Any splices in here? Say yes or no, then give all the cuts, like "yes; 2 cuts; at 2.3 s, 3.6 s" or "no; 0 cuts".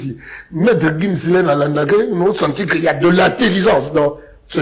no; 0 cuts